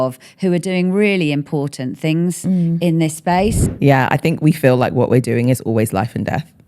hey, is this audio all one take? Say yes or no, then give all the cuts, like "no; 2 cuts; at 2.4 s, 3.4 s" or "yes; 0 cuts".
no; 1 cut; at 3.7 s